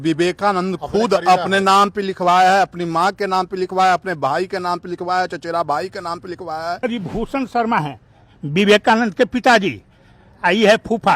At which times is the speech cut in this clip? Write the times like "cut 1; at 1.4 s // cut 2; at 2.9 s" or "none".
cut 1; at 6.8 s